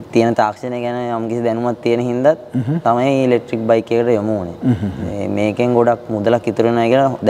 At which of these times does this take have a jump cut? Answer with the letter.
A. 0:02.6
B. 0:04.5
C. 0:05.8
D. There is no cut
D